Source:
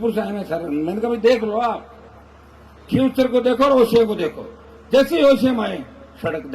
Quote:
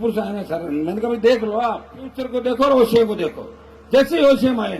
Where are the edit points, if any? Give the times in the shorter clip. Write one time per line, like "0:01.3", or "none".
0:02.3